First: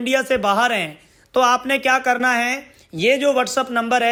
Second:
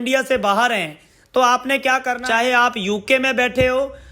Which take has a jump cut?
second; 1 cut; at 2.1 s

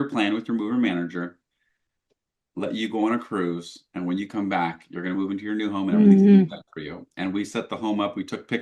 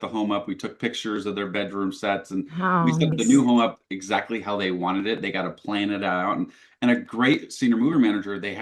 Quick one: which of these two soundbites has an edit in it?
second; 1 cut; at 3.1 s

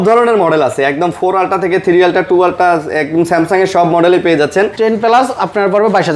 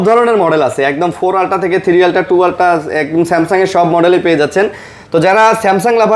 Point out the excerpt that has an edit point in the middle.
first; 1 cut; at 4.7 s

